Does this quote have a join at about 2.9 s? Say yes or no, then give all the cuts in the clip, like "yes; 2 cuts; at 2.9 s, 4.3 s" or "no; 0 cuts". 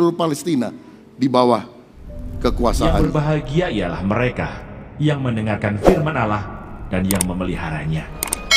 yes; 1 cut; at 2.9 s